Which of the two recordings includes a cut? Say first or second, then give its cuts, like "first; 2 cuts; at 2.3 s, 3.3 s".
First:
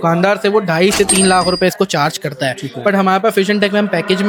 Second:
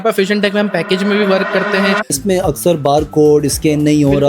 second; 1 cut; at 2.2 s